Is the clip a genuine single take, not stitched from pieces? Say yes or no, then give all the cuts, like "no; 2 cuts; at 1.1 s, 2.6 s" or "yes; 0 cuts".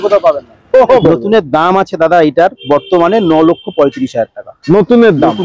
no; 1 cut; at 1.0 s